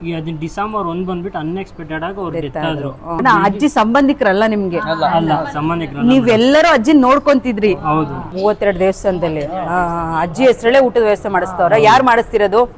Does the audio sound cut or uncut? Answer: cut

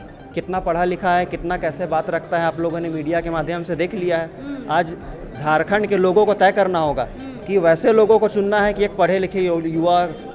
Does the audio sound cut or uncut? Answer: uncut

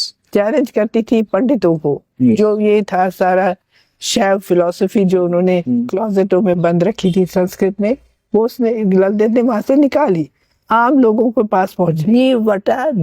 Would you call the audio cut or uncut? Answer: cut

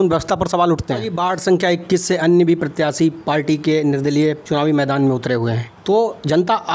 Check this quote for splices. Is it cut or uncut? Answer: cut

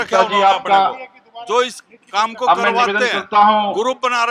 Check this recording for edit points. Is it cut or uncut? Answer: uncut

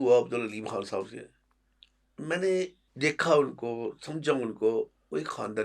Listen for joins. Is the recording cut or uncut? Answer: cut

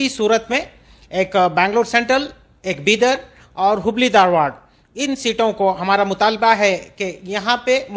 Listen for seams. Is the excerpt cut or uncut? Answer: uncut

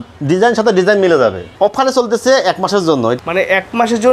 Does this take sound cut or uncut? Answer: cut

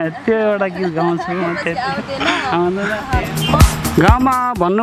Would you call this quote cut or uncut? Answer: cut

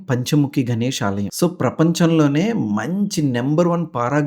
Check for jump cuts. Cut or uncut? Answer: cut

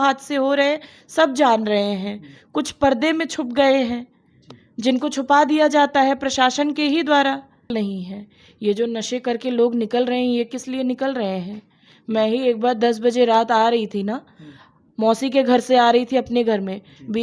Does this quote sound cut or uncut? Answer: cut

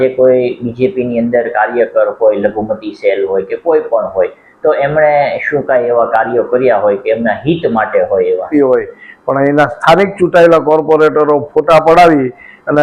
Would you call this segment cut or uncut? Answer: cut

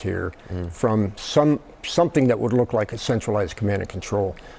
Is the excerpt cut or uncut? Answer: uncut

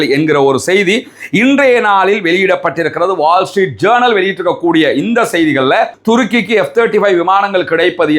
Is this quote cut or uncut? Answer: cut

